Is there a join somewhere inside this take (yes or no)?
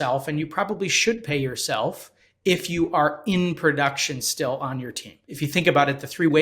yes